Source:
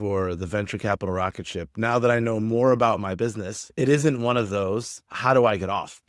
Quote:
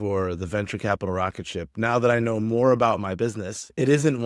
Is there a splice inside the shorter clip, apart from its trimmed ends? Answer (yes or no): no